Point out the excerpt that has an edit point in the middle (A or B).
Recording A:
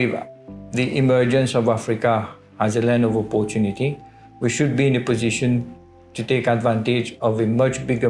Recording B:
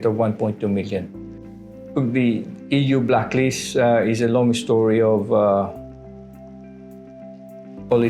B